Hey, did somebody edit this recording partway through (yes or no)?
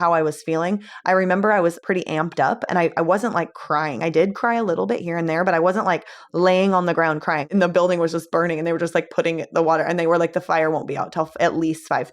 yes